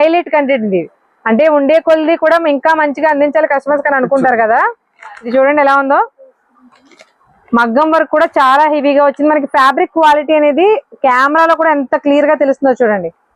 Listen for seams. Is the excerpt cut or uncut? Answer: cut